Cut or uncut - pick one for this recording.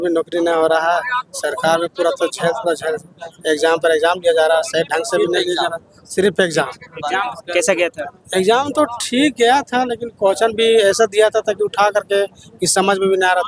uncut